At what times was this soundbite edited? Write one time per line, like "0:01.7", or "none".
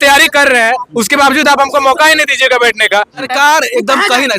0:03.2